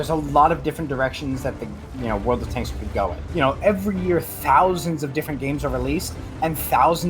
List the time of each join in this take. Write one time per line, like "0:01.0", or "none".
0:03.3